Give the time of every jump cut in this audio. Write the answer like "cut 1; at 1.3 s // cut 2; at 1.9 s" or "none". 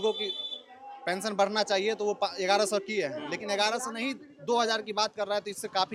none